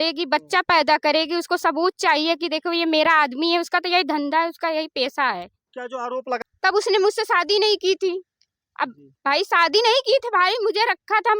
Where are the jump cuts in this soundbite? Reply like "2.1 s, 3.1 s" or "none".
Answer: 6.4 s